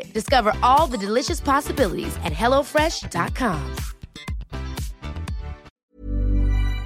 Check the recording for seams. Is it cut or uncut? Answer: cut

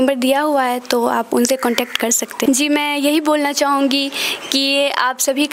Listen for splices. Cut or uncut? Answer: cut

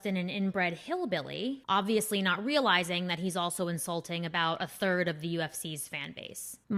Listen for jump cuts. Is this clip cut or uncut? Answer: uncut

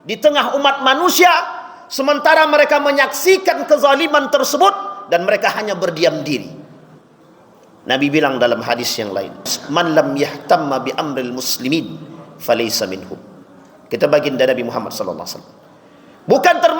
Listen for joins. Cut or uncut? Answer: cut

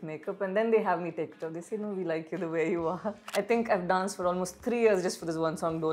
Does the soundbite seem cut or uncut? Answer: cut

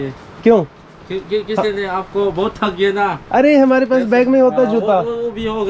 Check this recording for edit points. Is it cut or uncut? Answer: uncut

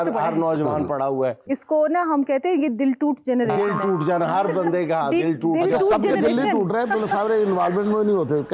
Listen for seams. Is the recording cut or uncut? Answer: uncut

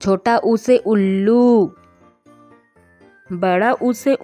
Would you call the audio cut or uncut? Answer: cut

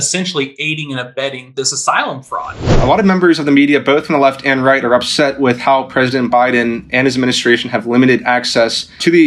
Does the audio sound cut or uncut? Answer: cut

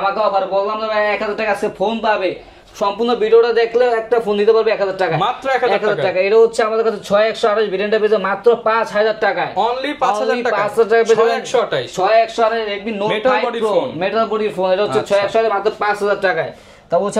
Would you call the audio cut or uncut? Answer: uncut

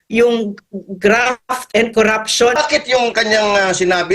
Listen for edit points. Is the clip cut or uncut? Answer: cut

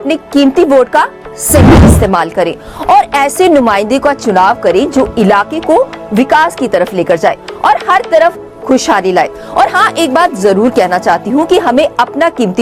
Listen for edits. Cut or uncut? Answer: uncut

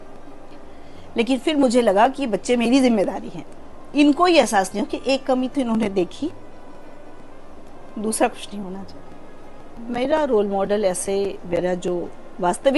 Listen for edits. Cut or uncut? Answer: cut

